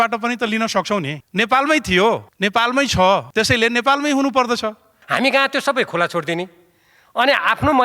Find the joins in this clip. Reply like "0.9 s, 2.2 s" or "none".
1.2 s, 2.3 s, 3.3 s, 4.9 s